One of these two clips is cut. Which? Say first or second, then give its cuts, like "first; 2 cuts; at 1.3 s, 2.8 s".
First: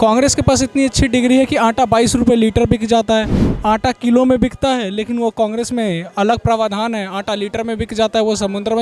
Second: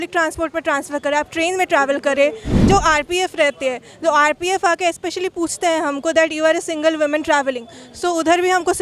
second; 1 cut; at 2.5 s